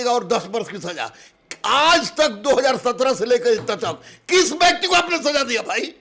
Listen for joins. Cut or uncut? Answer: uncut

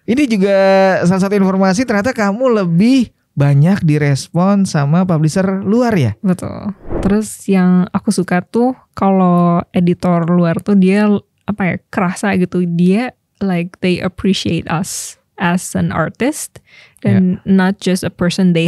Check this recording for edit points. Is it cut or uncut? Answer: cut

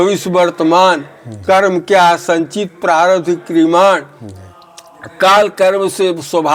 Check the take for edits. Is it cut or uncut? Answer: uncut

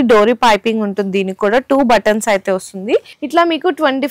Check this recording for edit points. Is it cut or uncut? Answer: cut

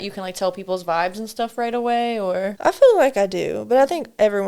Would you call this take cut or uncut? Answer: cut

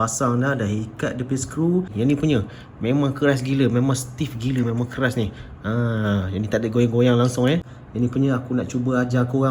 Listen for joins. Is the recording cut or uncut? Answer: cut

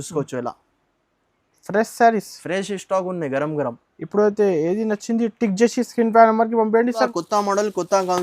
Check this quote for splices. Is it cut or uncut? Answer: cut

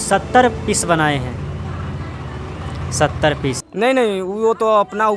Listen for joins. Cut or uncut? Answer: cut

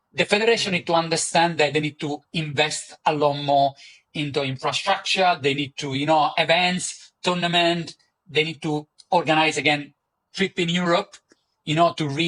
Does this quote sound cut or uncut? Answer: uncut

